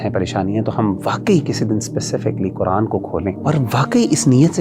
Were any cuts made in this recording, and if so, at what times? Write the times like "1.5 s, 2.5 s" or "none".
3.4 s